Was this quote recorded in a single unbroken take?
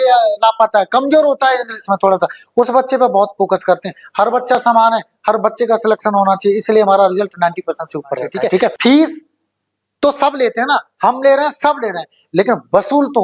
no; 1 cut; at 8.8 s

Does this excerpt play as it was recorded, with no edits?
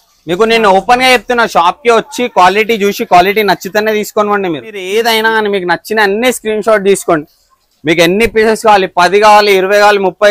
no; 1 cut; at 4.9 s

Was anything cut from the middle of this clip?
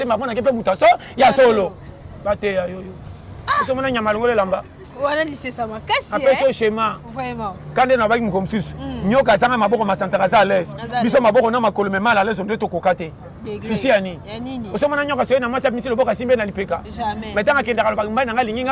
no; 0 cuts

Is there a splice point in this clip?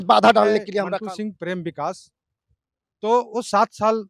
yes; 1 cut; at 0.9 s

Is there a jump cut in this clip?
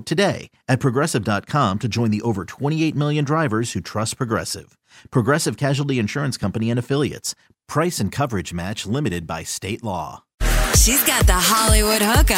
yes; 1 cut; at 10.5 s

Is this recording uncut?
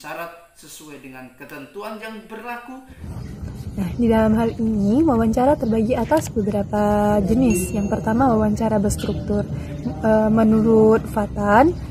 no; 1 cut; at 3.0 s

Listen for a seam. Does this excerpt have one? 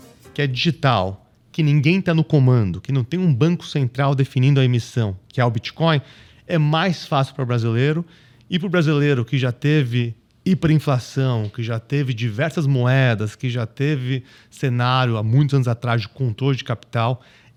no; 0 cuts

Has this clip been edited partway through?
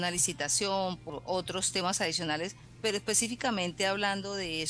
yes; 2 cuts; at 1.0 s, 2.6 s

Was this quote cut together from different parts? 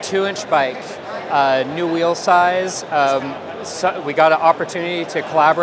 no; 0 cuts

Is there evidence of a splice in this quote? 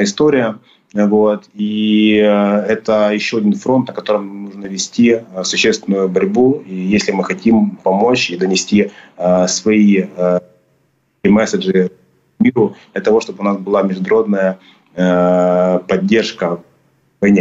no; 0 cuts

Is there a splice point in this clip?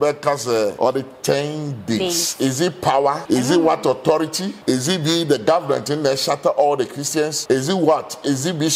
yes; 4 cuts; at 0.7 s, 3.2 s, 4.5 s, 7.4 s

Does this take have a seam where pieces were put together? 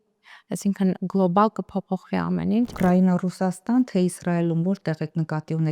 yes; 1 cut; at 2.7 s

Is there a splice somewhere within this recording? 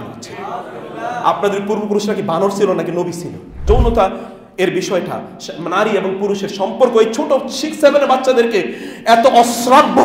yes; 1 cut; at 3.6 s

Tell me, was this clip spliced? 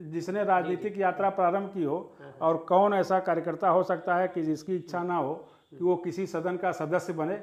no; 0 cuts

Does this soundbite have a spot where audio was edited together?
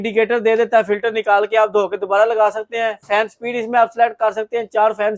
no; 0 cuts

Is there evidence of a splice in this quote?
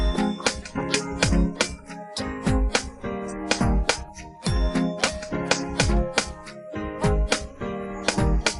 no; 0 cuts

